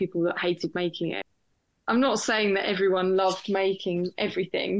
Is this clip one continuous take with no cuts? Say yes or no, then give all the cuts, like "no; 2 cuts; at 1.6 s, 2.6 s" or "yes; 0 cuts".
yes; 0 cuts